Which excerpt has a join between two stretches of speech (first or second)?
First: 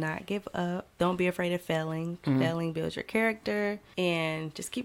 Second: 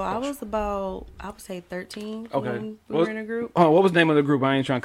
first